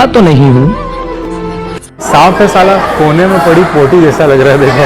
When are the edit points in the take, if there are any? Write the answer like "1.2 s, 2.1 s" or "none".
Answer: 1.9 s